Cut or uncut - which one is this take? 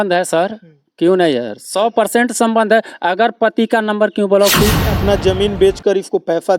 cut